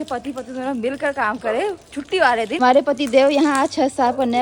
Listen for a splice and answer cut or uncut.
cut